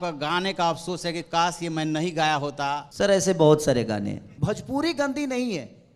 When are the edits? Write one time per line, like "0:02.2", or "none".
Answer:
0:02.9
0:04.3